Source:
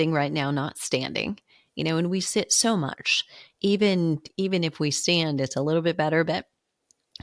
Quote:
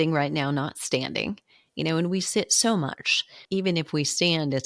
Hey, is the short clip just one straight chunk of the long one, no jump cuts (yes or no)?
no